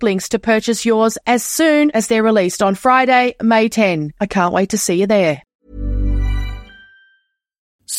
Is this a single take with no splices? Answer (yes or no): no